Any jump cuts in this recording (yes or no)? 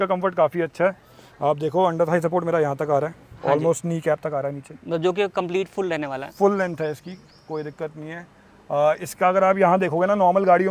no